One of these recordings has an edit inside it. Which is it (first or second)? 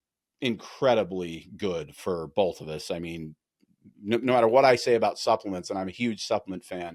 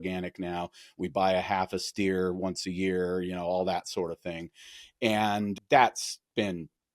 second